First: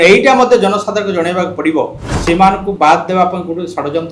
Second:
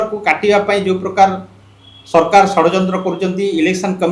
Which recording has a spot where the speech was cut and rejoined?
first; 1 cut; at 2.1 s

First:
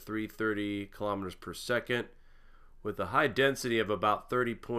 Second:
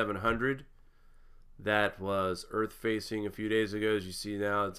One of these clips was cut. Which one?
second; 1 cut; at 2.1 s

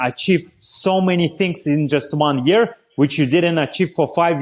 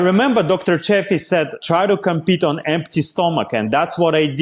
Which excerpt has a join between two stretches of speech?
second; 1 cut; at 1.6 s

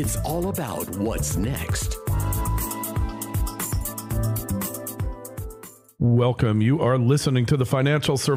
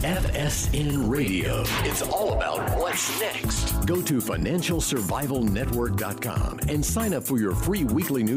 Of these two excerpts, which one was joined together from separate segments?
first; 1 cut; at 5.8 s

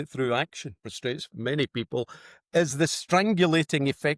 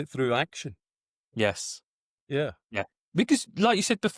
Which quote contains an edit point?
first; 1 cut; at 0.9 s

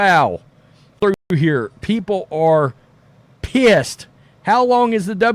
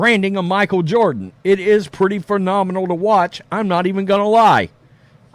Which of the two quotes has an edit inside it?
first; 1 cut; at 1.3 s

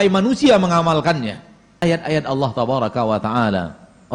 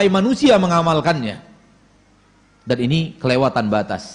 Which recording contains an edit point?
first; 1 cut; at 1.8 s

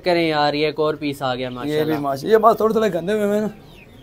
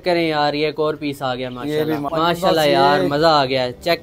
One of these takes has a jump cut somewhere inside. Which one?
second; 1 cut; at 2.1 s

